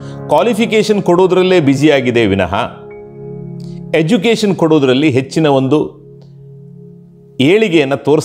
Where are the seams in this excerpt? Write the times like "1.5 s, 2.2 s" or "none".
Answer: none